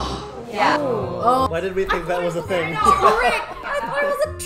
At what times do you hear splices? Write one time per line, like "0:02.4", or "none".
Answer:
0:01.5
0:03.6